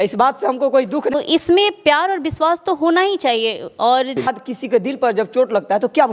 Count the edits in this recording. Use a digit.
2